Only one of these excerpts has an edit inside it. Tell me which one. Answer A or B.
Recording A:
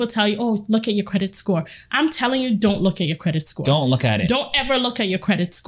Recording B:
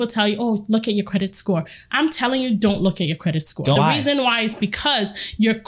B